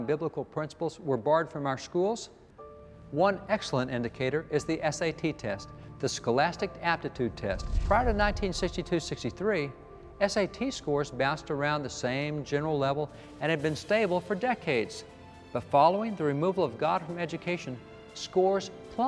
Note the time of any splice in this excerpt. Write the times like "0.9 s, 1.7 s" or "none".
7.7 s